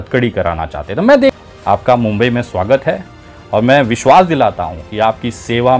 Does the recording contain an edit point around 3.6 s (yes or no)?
no